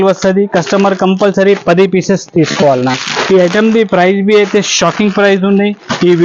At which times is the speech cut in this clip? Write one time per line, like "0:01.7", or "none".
none